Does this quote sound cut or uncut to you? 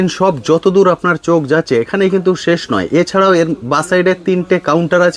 uncut